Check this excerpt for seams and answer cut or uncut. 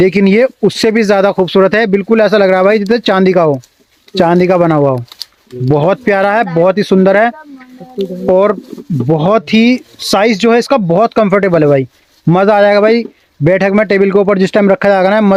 uncut